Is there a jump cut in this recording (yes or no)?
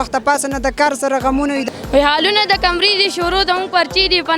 yes